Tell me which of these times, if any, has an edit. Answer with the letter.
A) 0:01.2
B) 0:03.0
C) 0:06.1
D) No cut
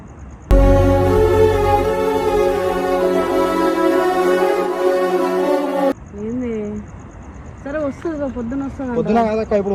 D